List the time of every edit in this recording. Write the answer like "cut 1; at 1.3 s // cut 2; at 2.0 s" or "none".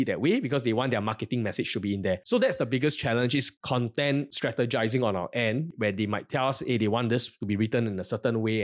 cut 1; at 2.2 s // cut 2; at 3.6 s